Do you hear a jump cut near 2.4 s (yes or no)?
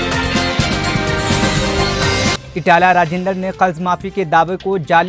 yes